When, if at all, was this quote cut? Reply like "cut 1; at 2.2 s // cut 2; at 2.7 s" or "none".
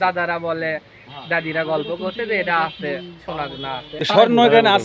cut 1; at 3.9 s